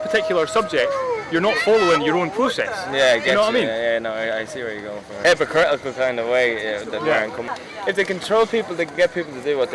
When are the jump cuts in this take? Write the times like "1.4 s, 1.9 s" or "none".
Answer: 5.2 s, 7.5 s

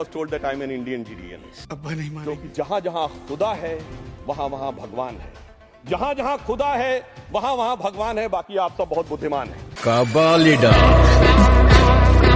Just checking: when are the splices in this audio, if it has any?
2.2 s

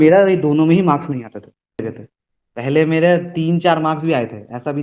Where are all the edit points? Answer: 1.8 s

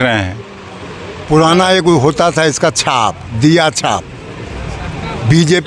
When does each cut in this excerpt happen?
1.1 s

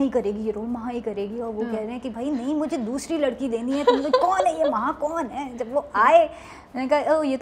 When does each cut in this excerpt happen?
none

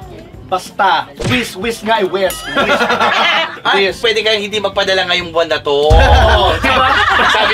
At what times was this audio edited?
4.0 s

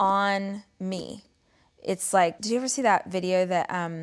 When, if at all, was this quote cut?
2.4 s

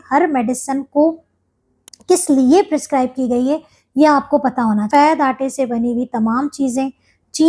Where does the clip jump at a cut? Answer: 4.9 s

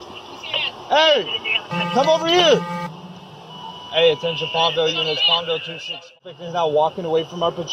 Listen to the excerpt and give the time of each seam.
6.2 s

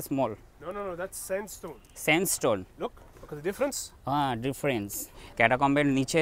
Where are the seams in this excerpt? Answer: 5.3 s

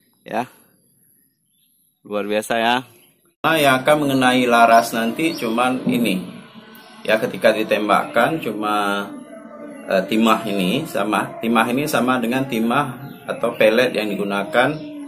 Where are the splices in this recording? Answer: 3.4 s

